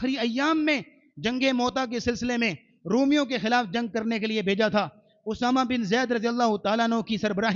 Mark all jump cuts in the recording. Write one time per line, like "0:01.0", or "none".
none